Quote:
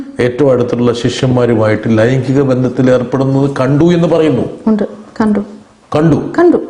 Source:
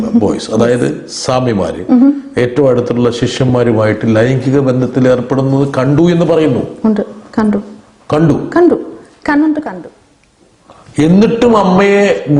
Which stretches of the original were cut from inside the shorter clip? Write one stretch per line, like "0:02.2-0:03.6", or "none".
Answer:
none